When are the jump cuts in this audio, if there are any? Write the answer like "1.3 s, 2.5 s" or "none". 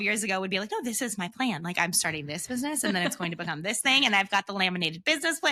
none